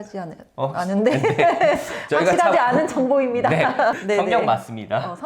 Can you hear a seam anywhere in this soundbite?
yes; 1 cut; at 4.0 s

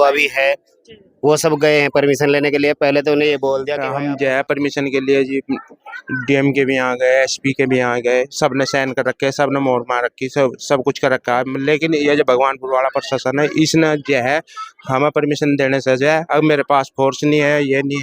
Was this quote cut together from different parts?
yes; 1 cut; at 3.8 s

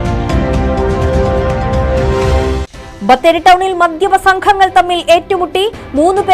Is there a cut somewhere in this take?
yes; 1 cut; at 2.4 s

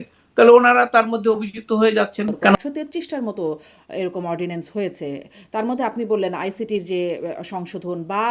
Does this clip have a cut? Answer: yes; 1 cut; at 2.6 s

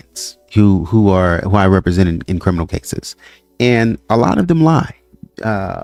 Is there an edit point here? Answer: no; 0 cuts

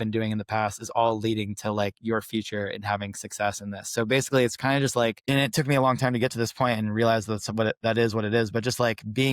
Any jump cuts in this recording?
yes; 1 cut; at 5.2 s

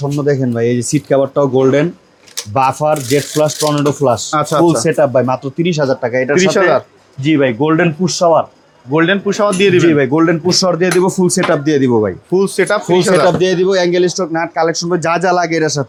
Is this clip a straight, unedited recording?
yes; 0 cuts

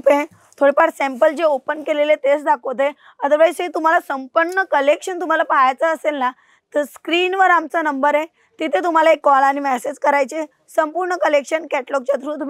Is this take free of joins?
yes; 0 cuts

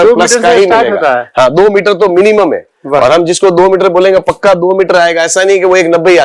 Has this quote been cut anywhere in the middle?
no; 0 cuts

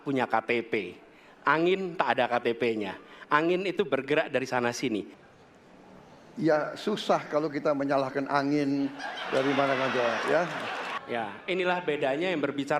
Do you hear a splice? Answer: yes; 2 cuts; at 5.2 s, 10.9 s

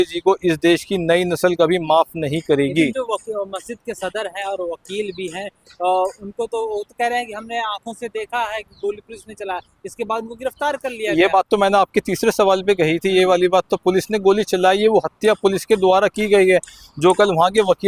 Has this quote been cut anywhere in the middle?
no; 0 cuts

